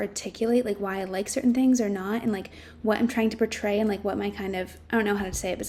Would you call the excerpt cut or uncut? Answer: uncut